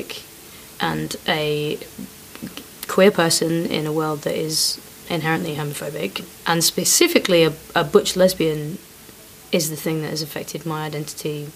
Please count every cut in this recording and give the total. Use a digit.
1